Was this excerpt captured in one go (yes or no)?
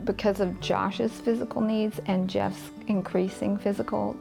yes